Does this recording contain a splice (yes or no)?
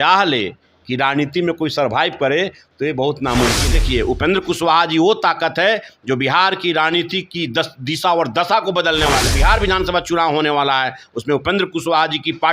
yes